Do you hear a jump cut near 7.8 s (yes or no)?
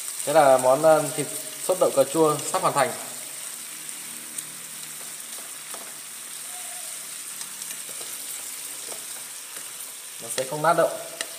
yes